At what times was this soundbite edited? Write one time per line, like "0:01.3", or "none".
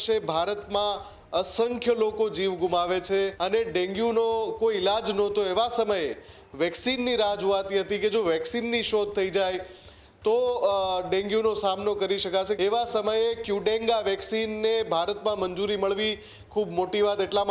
0:03.4
0:12.5